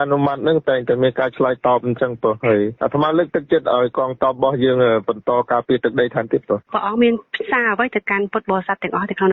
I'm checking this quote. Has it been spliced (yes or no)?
yes